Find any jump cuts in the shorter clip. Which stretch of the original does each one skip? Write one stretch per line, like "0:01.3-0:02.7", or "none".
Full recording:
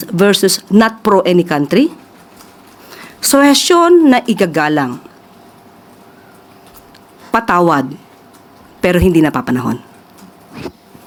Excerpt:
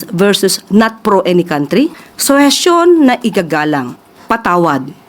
0:02.1-0:03.1
0:05.1-0:07.1